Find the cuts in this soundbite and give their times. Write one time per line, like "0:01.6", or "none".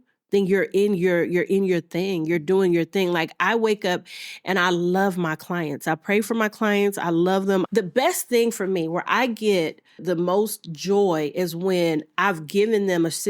0:07.7
0:10.0